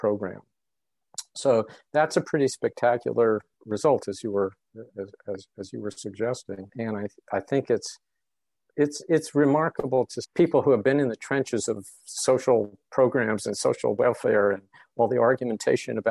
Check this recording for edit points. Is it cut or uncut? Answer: uncut